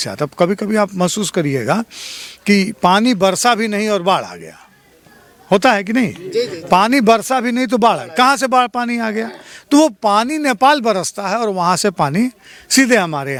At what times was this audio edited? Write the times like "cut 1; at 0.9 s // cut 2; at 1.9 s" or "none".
none